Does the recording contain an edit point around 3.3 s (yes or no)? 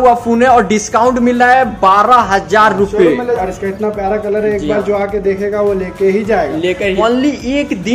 yes